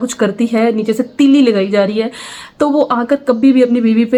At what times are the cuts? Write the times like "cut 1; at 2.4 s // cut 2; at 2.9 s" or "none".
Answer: none